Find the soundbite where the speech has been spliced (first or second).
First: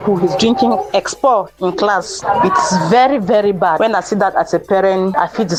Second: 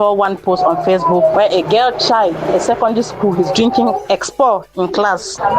second